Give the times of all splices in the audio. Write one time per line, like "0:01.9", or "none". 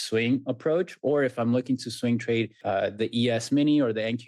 0:02.6